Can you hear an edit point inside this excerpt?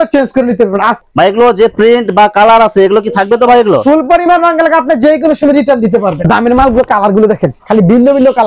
yes; 2 cuts; at 1.0 s, 6.2 s

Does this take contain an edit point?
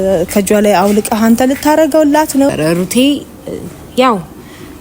yes; 1 cut; at 2.5 s

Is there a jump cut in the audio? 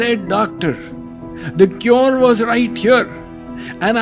no; 0 cuts

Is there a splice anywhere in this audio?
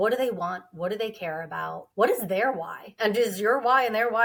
no; 0 cuts

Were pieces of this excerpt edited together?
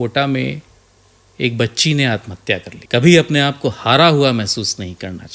yes; 1 cut; at 2.7 s

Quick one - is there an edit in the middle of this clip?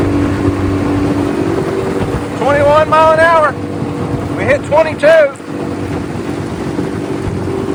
no; 0 cuts

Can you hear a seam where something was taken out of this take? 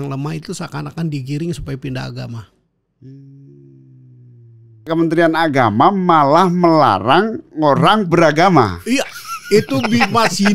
yes; 1 cut; at 4.8 s

